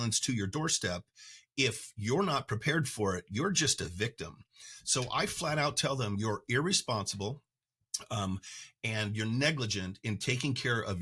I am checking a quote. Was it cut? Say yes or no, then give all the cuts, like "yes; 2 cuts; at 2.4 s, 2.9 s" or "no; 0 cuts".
no; 0 cuts